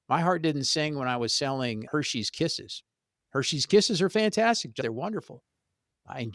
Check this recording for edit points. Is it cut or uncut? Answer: cut